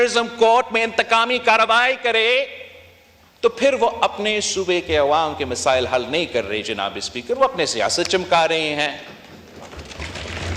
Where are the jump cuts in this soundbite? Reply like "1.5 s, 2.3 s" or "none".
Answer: none